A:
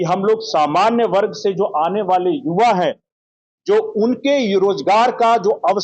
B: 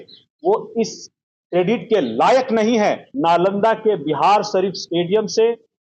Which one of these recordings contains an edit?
B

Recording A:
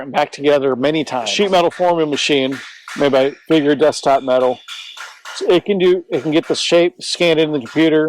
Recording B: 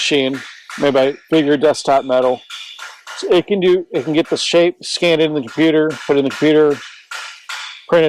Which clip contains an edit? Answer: A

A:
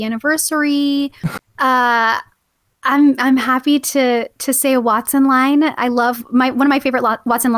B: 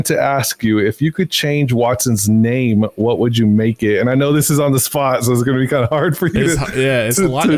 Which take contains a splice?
A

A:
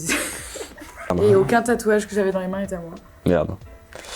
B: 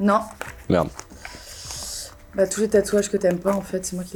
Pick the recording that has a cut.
A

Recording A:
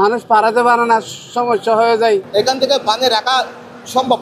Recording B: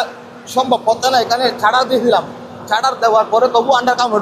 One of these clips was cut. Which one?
A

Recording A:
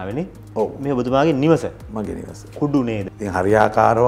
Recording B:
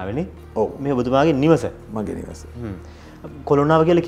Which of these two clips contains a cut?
A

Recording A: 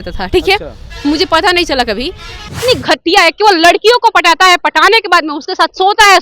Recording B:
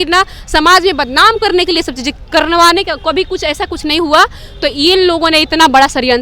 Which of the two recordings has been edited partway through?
A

